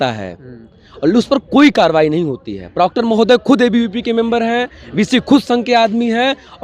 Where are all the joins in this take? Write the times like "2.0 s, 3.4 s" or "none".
none